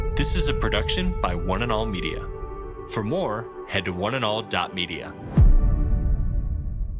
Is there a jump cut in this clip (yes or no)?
no